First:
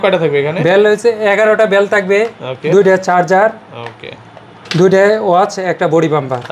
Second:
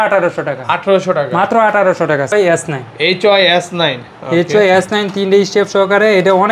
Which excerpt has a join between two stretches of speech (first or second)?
second